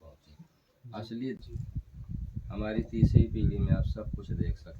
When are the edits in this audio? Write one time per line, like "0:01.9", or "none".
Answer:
0:01.4